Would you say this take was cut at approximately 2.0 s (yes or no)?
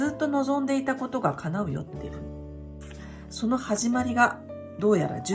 yes